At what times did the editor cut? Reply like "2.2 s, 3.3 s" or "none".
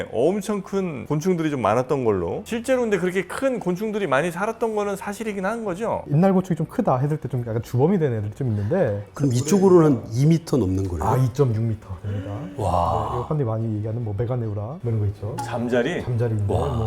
2.4 s, 6.1 s, 9.5 s, 13.2 s